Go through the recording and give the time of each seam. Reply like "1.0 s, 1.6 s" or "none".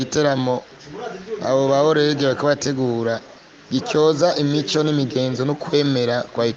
none